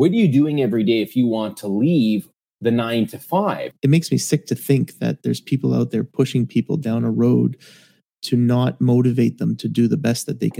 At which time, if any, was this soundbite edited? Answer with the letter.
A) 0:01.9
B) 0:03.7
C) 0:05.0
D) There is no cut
B